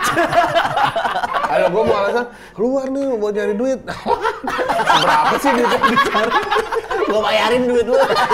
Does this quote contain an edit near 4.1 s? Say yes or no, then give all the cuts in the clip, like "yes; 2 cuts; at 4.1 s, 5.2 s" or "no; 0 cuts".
no; 1 cut; at 1.5 s